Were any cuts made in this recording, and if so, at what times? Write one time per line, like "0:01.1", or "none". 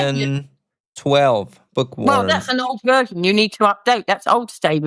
none